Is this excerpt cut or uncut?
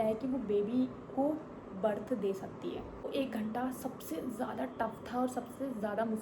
cut